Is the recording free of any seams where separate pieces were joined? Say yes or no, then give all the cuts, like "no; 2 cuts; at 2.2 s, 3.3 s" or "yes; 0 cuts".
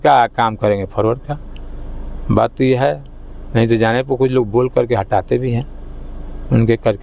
yes; 0 cuts